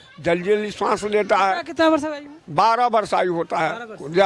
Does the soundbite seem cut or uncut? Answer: uncut